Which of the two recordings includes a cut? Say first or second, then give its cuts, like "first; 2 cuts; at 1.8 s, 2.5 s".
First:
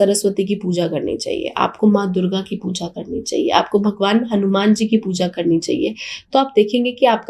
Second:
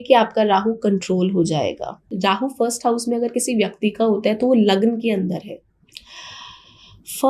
second; 1 cut; at 2.1 s